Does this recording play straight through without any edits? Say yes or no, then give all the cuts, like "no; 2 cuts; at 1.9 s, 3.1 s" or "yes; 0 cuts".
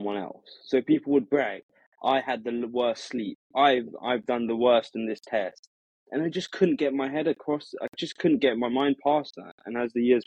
yes; 0 cuts